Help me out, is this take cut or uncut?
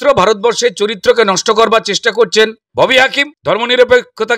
cut